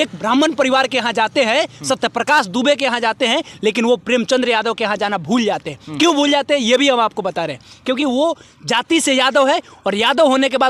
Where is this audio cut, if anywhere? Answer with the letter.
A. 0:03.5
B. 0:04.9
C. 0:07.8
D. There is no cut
D